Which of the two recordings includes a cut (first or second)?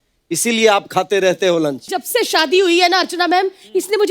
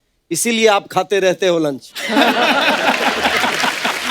first